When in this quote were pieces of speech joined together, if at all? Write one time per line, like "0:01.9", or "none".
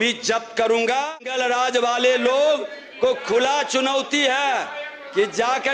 0:01.2